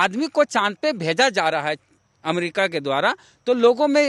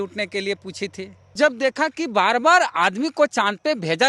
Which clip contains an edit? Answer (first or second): second